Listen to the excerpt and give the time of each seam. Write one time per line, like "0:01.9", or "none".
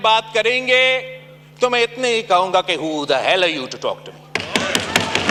none